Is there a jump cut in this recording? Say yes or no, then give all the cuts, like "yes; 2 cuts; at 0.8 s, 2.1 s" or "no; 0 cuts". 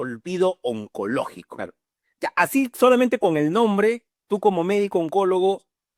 no; 0 cuts